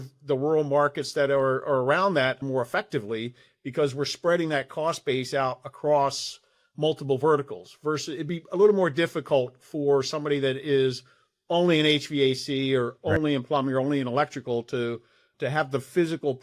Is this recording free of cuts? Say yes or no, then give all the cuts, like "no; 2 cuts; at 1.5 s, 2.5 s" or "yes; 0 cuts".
no; 1 cut; at 2.4 s